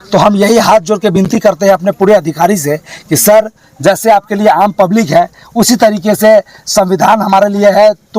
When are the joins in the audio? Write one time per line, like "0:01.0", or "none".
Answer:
none